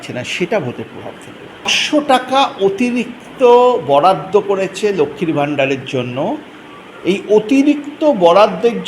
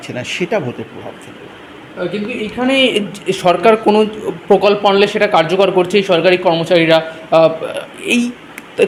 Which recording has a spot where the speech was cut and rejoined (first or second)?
first